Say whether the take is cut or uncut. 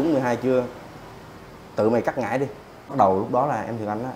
cut